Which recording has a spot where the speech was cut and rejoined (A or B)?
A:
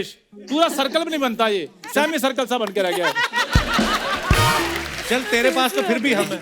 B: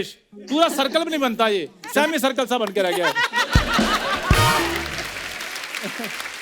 A